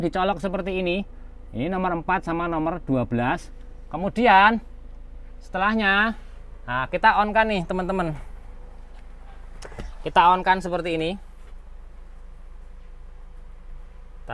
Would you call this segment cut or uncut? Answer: uncut